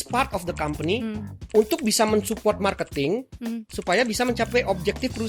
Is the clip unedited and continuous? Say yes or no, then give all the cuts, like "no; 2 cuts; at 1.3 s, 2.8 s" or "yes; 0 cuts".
yes; 0 cuts